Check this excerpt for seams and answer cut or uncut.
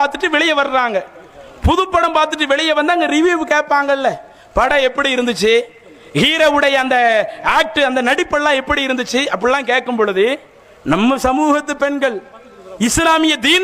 uncut